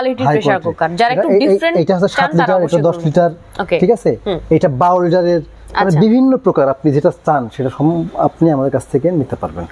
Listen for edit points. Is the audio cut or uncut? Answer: uncut